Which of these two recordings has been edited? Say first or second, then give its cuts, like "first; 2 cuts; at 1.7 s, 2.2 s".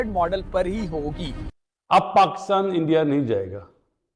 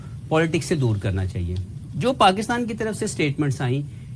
first; 1 cut; at 1.5 s